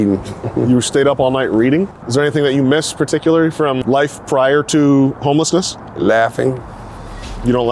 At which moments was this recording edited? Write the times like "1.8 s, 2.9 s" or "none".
1.9 s, 3.8 s